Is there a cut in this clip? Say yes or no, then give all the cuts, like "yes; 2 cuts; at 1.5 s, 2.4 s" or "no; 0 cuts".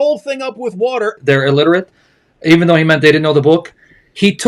yes; 1 cut; at 1.2 s